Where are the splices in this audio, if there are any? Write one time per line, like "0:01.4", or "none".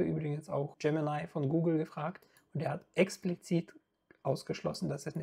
none